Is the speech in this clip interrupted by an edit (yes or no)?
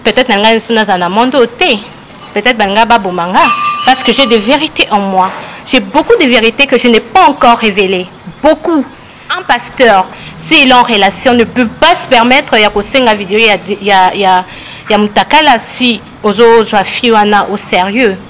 yes